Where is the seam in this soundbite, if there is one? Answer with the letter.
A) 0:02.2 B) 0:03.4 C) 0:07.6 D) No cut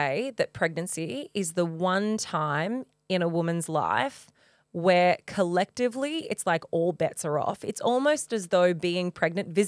D